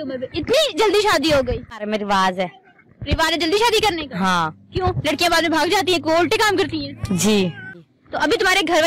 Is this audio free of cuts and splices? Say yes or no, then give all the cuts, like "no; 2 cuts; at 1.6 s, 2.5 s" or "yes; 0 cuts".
no; 2 cuts; at 1.7 s, 7.9 s